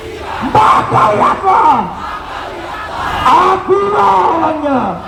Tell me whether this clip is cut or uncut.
uncut